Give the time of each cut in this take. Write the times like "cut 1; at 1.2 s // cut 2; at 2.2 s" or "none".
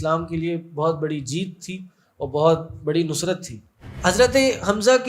cut 1; at 3.9 s